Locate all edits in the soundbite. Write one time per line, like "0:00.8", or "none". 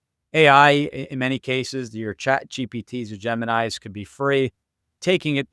none